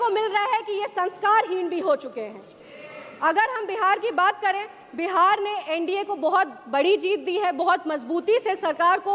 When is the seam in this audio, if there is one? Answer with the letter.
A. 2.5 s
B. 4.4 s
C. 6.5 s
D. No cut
D